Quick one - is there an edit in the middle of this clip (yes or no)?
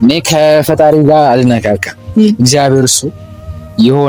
no